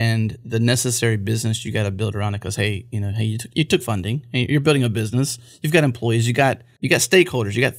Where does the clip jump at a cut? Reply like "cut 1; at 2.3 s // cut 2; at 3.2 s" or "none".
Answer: cut 1; at 6.7 s

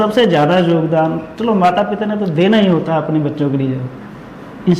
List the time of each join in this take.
none

